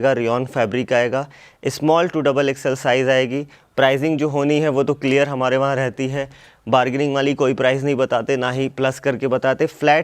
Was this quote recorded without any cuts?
yes; 0 cuts

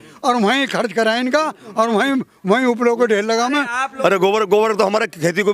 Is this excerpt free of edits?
no; 1 cut; at 3.8 s

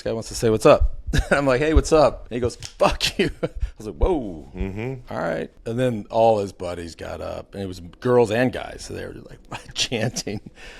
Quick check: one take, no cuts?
no; 2 cuts; at 2.2 s, 5.6 s

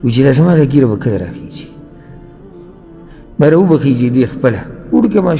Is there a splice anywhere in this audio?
no; 0 cuts

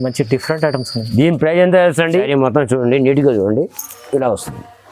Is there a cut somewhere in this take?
yes; 1 cut; at 2.3 s

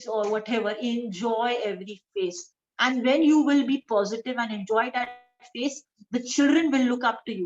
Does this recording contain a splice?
no; 0 cuts

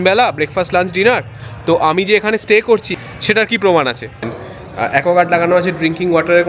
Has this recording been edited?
yes; 2 cuts; at 2.9 s, 4.4 s

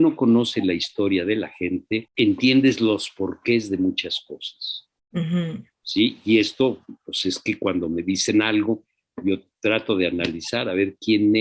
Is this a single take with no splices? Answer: no; 1 cut; at 2.1 s

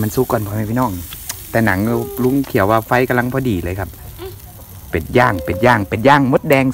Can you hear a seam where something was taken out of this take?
no; 0 cuts

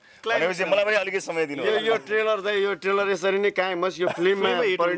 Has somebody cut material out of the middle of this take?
no; 0 cuts

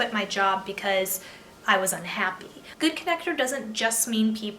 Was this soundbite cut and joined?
yes; 1 cut; at 2.7 s

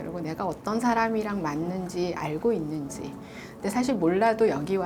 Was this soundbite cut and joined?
no; 0 cuts

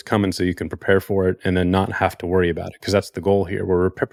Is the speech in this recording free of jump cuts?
yes; 0 cuts

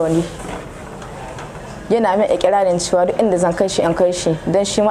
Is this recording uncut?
yes; 0 cuts

